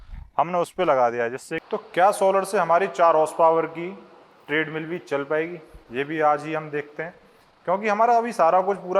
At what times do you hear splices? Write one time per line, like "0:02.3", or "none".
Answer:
0:01.5